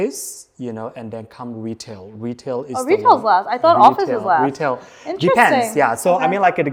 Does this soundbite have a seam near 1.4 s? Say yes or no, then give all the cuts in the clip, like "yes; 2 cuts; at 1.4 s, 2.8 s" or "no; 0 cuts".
no; 0 cuts